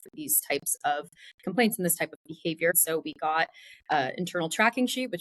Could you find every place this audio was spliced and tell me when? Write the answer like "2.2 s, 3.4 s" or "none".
2.7 s